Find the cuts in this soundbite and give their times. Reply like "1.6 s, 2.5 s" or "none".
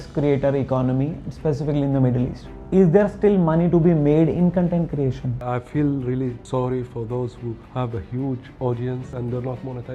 2.5 s, 5.4 s, 6.4 s, 7.6 s, 9.1 s